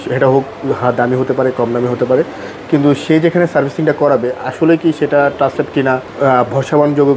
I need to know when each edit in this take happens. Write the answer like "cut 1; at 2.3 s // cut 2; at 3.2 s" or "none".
cut 1; at 6.1 s